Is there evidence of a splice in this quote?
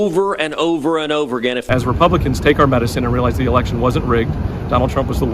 yes; 1 cut; at 1.7 s

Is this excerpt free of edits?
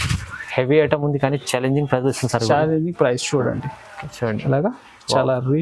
yes; 0 cuts

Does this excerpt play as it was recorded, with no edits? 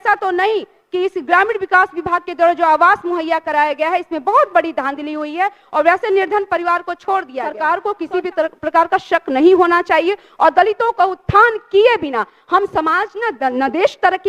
no; 1 cut; at 7.7 s

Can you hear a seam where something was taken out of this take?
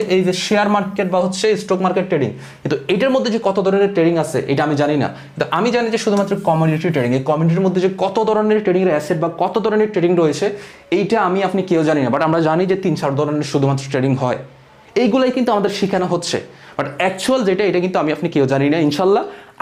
no; 0 cuts

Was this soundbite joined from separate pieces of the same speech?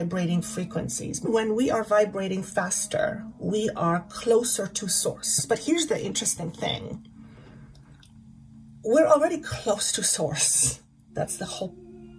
yes; 2 cuts; at 1.2 s, 5.4 s

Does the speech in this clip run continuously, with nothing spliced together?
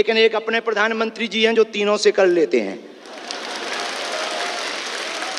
yes; 0 cuts

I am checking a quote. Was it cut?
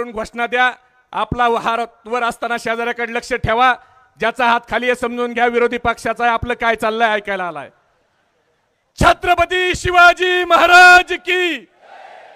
no; 0 cuts

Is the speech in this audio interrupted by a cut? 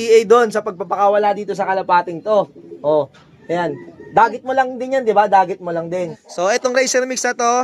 yes; 1 cut; at 6.2 s

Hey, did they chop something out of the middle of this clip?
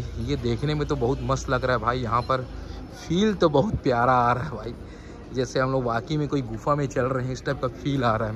no; 0 cuts

